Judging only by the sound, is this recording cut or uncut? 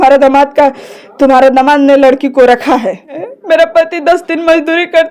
cut